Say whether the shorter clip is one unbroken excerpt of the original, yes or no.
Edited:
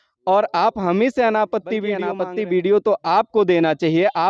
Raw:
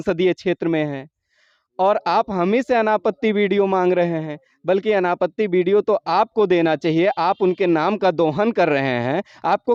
no